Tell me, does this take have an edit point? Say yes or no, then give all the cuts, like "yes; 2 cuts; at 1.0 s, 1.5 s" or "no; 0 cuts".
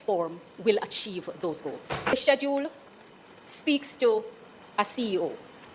no; 0 cuts